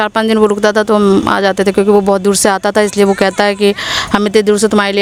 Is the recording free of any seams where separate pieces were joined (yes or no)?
yes